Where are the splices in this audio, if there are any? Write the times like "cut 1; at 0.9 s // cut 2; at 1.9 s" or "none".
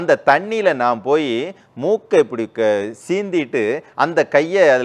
none